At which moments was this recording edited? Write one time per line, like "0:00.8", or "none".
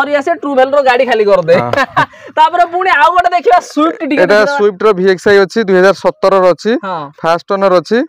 none